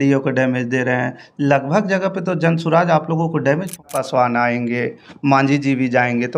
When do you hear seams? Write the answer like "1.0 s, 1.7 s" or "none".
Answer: 3.9 s